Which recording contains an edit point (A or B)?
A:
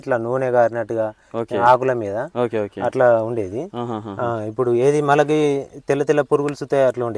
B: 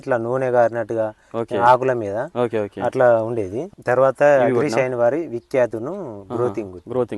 B